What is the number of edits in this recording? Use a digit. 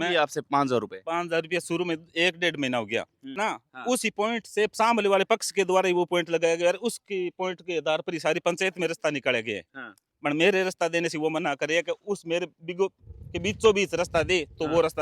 1